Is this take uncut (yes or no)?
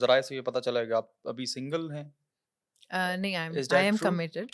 yes